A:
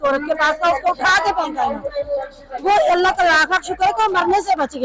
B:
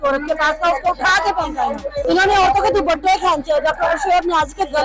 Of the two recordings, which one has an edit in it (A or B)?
B